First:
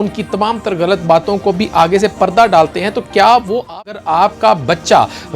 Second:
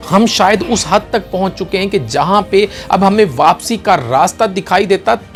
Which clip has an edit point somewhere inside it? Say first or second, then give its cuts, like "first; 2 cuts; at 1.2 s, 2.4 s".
first; 1 cut; at 3.8 s